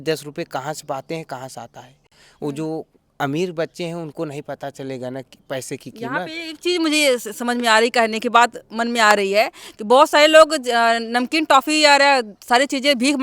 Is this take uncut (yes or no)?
yes